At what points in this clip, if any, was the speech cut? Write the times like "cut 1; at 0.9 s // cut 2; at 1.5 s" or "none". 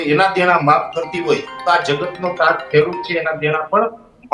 none